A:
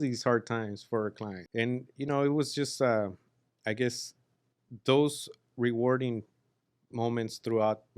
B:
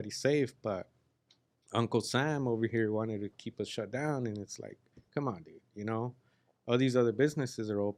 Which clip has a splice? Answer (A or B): A